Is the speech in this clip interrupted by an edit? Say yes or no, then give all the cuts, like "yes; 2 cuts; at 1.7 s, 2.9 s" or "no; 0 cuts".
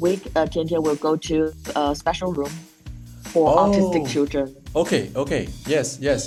no; 0 cuts